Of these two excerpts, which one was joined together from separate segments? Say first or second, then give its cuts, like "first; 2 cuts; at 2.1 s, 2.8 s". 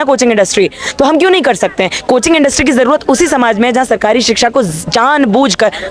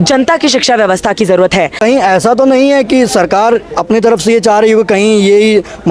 second; 1 cut; at 1.7 s